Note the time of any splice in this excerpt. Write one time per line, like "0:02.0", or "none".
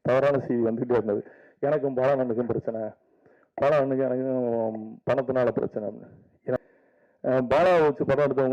0:06.6